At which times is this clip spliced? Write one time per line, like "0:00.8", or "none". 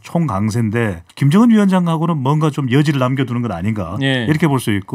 0:01.0